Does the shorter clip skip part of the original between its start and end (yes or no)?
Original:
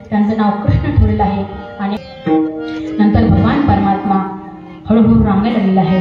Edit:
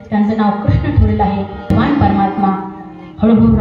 yes